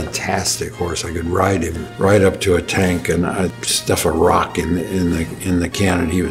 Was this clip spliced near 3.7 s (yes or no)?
yes